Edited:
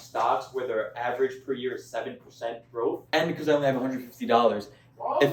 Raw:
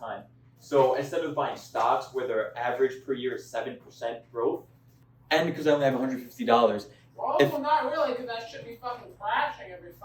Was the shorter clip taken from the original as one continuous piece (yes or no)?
no